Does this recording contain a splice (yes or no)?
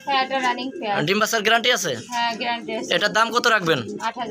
no